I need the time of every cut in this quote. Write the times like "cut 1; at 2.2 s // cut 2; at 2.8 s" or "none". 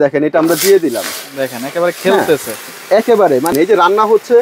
cut 1; at 3.5 s